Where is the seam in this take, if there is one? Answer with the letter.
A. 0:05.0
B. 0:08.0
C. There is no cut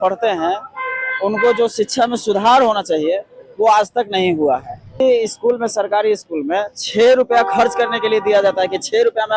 A